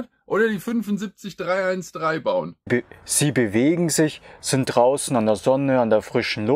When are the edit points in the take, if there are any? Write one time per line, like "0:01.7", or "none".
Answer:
0:02.6